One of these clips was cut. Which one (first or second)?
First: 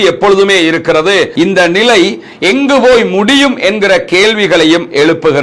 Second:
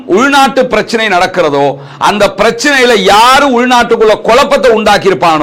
first